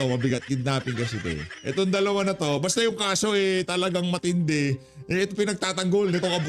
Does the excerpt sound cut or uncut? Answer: uncut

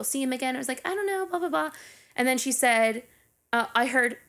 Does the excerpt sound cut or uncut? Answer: uncut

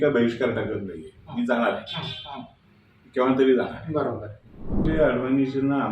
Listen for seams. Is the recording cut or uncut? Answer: cut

